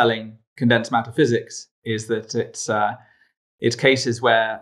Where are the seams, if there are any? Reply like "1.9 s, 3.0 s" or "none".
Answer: none